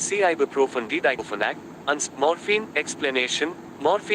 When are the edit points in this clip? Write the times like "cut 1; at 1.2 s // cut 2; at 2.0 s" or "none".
cut 1; at 1.0 s

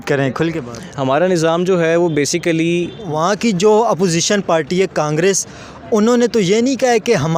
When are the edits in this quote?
cut 1; at 3.1 s

